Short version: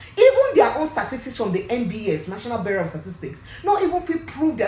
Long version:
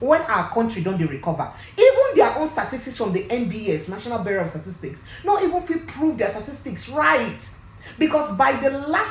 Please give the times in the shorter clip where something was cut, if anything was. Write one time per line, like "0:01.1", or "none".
none